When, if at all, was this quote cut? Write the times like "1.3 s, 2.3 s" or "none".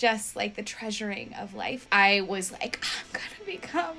1.8 s